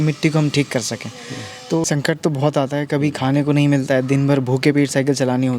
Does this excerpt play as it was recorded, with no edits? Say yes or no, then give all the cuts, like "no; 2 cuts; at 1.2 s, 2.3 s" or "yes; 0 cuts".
no; 1 cut; at 1.8 s